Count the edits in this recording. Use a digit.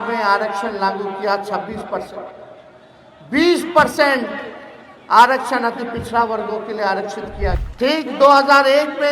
1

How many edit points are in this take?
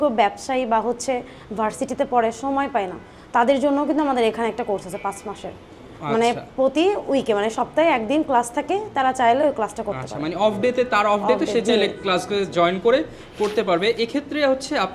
0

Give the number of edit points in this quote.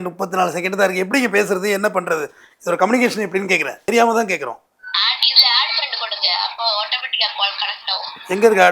2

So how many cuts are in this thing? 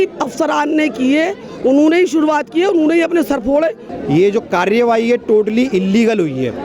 1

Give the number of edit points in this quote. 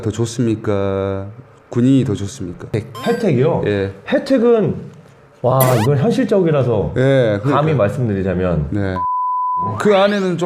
1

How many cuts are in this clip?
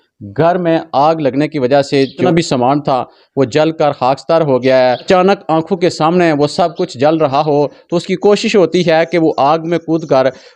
2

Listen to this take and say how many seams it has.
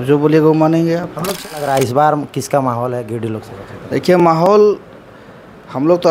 1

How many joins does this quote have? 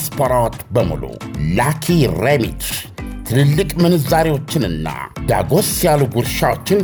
0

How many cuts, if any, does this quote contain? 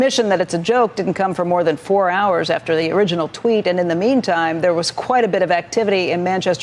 0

